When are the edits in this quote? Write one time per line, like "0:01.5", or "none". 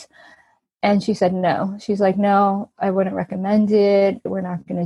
none